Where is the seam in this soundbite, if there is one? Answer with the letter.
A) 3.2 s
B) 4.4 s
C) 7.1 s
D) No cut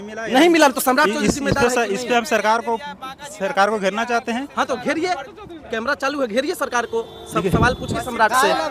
D